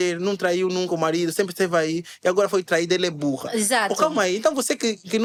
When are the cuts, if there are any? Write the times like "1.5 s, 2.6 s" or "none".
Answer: none